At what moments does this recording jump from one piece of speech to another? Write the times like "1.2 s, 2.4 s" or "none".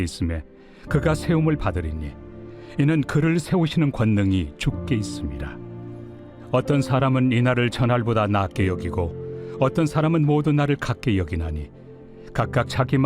5.8 s